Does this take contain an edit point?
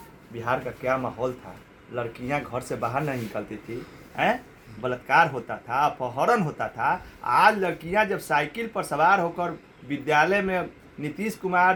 no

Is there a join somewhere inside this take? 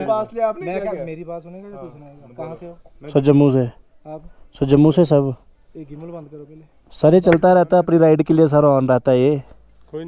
no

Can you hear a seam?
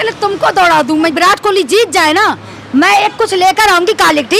yes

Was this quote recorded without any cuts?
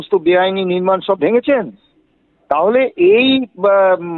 yes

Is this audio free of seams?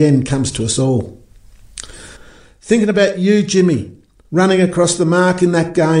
no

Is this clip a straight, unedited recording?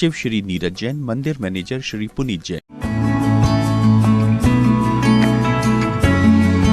no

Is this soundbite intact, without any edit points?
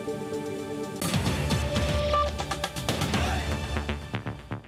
no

